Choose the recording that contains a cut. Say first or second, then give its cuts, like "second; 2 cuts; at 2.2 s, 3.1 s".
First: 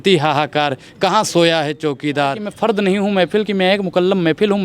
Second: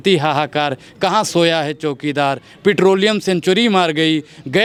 first; 1 cut; at 2.5 s